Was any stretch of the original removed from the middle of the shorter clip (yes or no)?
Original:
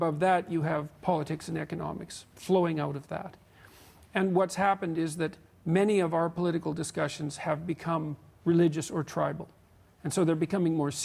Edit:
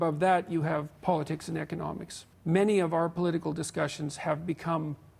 yes